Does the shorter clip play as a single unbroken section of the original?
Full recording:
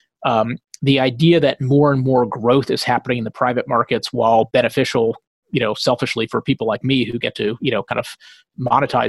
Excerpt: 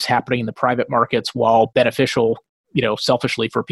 yes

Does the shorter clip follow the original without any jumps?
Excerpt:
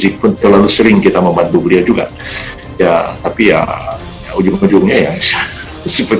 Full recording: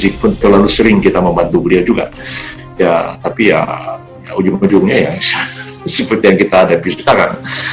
yes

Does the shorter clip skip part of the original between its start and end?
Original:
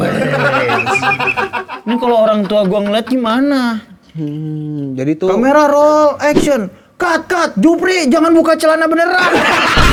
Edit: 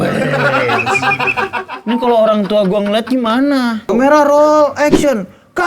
yes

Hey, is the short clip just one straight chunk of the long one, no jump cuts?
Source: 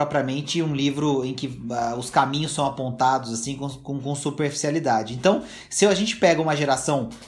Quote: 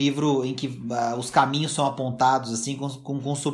yes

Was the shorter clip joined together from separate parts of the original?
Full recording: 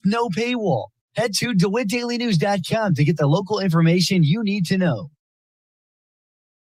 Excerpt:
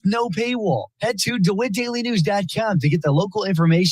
yes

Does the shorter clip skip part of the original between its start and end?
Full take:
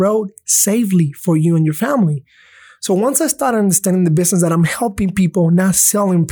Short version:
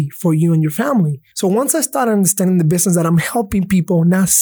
yes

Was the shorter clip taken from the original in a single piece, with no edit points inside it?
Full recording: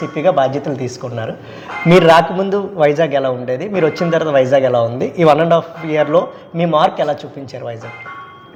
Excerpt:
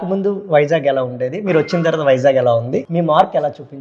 no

